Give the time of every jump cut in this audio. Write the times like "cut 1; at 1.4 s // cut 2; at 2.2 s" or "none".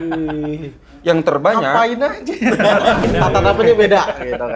cut 1; at 2.7 s